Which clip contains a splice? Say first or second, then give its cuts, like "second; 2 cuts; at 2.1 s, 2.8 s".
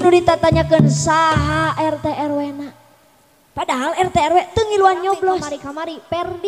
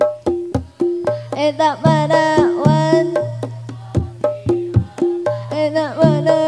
first; 1 cut; at 5.6 s